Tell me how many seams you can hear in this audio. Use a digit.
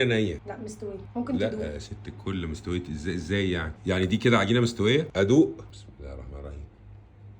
3